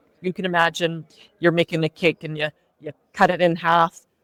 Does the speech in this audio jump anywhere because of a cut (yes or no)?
no